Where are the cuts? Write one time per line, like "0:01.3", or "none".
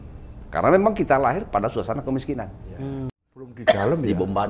0:03.3

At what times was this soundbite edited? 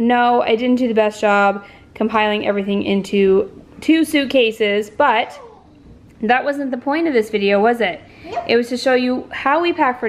none

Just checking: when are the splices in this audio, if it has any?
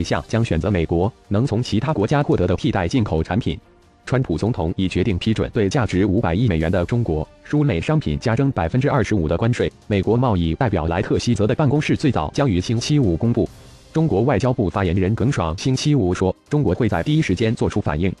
none

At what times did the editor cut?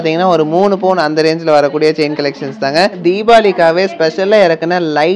0:03.0

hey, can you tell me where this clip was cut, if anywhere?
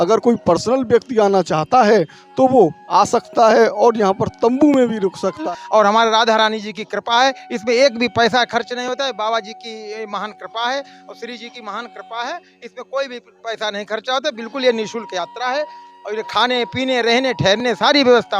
0:05.4

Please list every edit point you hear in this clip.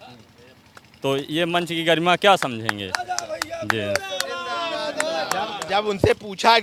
none

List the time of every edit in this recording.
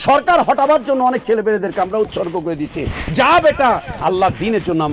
none

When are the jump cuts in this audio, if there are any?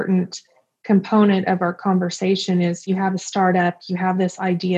0:02.9

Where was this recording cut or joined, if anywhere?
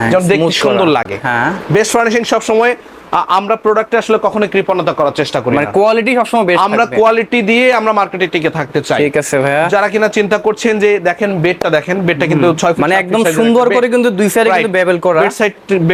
none

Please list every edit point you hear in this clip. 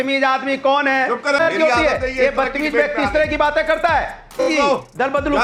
0:01.4
0:04.4

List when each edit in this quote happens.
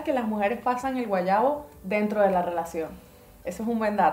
none

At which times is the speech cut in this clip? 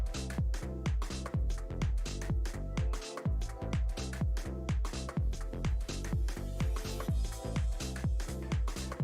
0:08.1

